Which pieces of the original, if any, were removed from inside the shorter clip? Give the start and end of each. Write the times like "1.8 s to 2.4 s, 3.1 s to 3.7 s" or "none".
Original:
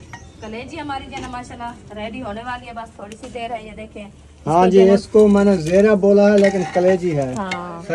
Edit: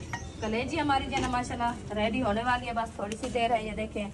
none